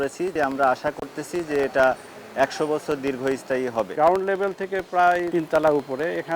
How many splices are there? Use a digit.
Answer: 2